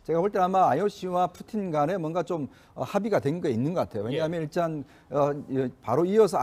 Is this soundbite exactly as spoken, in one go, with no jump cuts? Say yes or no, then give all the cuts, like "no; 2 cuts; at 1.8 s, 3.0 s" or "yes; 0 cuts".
yes; 0 cuts